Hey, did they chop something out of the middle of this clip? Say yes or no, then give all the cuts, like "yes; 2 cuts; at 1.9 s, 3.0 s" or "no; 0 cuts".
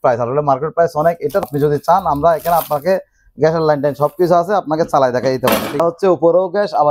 yes; 2 cuts; at 1.5 s, 5.8 s